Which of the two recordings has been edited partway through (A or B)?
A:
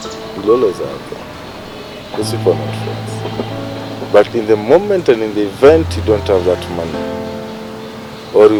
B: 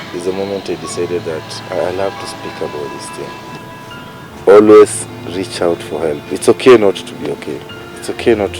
B